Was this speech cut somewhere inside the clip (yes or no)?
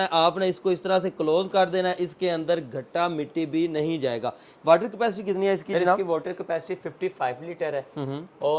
no